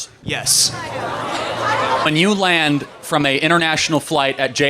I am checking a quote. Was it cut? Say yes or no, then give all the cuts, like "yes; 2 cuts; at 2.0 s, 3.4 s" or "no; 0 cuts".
yes; 1 cut; at 2.1 s